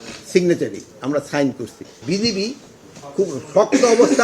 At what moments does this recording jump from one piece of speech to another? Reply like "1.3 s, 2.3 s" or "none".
2.0 s